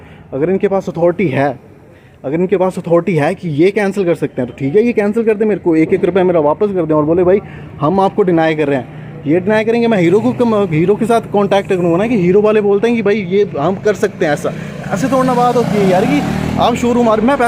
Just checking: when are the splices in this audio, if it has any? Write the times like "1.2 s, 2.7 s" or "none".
none

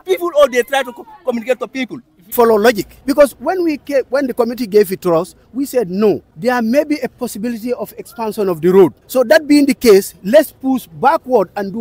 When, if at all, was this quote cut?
2.3 s, 2.9 s, 6.3 s, 9.0 s

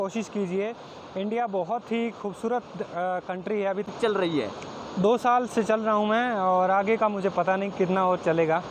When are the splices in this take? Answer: 3.9 s

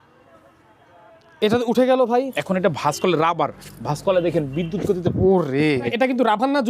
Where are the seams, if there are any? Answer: 2.4 s, 5.9 s

